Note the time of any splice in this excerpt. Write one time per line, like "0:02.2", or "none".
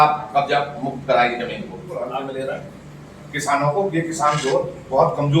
0:01.9